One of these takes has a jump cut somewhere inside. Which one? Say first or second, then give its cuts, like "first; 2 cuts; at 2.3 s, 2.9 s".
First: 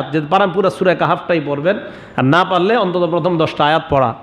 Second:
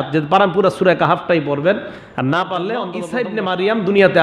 second; 1 cut; at 3.1 s